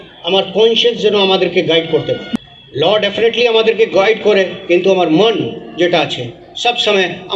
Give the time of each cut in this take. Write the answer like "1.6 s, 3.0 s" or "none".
2.2 s

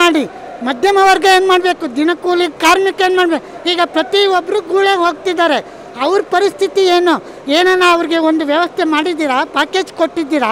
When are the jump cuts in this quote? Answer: none

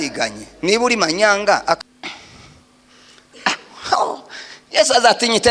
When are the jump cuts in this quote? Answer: 1.8 s

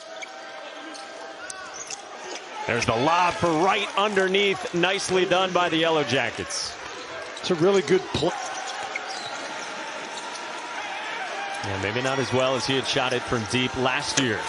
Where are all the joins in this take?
8.3 s

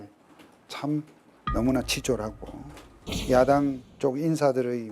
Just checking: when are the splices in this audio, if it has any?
1.2 s, 2.8 s, 3.9 s

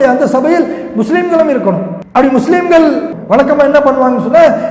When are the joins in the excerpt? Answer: 2.0 s, 3.1 s

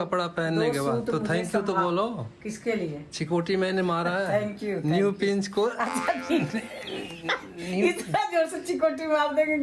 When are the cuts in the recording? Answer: none

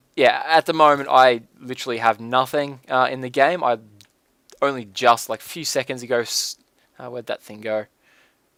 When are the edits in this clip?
none

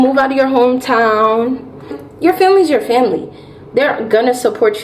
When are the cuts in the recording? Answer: 2.0 s

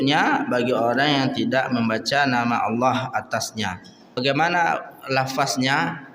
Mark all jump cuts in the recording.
4.2 s

